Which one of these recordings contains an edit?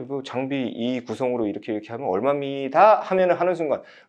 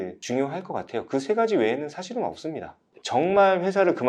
second; 1 cut; at 3.0 s

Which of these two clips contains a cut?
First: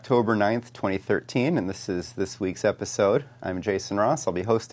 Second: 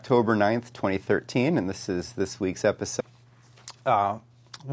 first; 1 cut; at 2.9 s

